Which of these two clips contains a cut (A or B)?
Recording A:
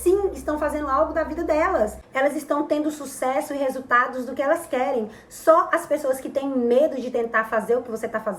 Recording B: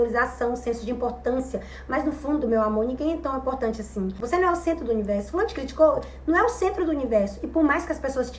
B